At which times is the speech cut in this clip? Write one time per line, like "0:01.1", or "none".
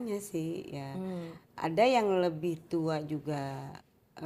none